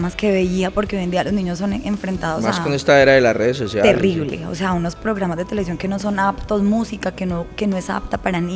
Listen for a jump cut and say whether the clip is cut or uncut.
uncut